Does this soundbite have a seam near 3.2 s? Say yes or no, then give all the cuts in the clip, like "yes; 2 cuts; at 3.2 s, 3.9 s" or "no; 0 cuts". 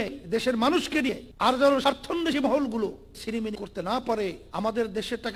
yes; 3 cuts; at 1.3 s, 3.2 s, 4.4 s